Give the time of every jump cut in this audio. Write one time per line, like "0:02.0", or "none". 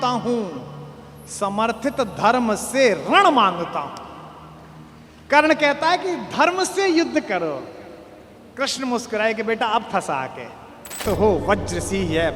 0:11.0